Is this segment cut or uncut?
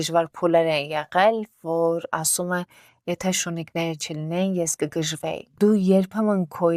uncut